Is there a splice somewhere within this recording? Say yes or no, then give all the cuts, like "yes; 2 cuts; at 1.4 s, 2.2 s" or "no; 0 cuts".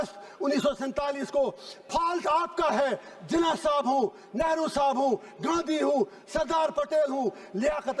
no; 0 cuts